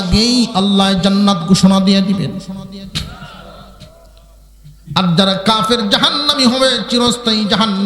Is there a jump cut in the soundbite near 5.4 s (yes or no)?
no